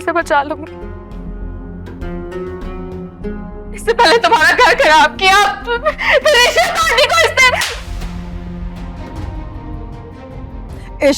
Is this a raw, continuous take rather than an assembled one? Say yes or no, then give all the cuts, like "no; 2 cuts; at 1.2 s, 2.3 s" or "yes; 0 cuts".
no; 1 cut; at 9.0 s